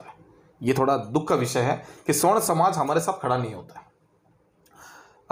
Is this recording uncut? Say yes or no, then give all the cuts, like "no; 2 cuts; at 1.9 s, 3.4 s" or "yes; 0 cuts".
yes; 0 cuts